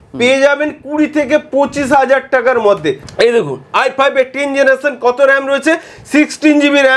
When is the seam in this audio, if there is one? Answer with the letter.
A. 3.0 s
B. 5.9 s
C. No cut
A